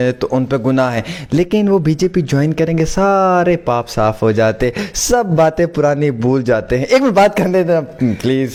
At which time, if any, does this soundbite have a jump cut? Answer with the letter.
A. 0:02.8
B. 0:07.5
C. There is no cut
C